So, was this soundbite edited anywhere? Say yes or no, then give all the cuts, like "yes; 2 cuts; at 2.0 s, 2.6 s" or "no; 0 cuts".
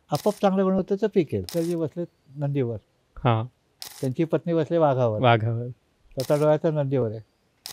yes; 1 cut; at 1.5 s